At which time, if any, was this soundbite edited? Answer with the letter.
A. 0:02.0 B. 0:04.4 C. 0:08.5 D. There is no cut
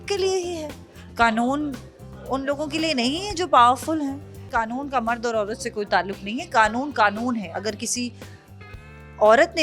B